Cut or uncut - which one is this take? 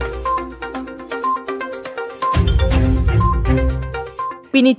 uncut